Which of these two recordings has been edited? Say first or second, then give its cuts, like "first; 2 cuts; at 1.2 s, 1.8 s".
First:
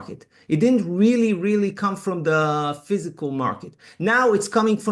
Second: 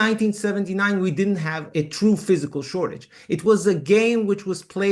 second; 1 cut; at 1.6 s